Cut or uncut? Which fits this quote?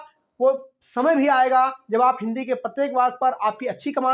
uncut